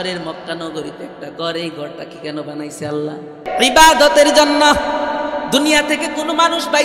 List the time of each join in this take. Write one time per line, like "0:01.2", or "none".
0:03.4